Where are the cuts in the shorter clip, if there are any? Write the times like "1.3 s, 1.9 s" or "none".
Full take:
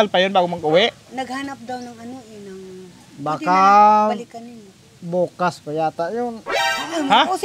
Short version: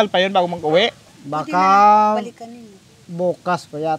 1.1 s